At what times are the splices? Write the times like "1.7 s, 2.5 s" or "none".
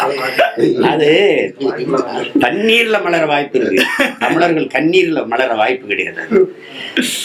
none